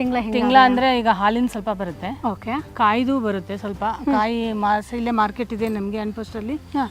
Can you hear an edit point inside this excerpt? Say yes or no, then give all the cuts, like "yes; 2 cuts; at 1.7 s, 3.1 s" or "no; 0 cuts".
no; 0 cuts